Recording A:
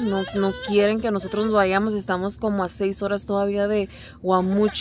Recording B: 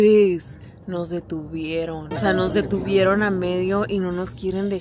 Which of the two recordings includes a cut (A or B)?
B